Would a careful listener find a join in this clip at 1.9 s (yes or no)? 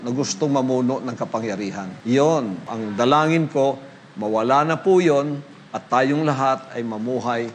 yes